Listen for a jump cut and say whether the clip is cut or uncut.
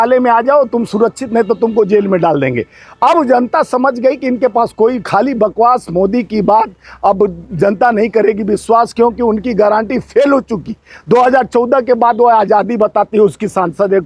uncut